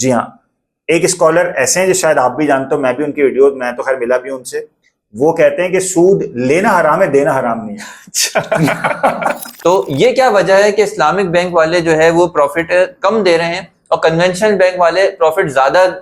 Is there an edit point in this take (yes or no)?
yes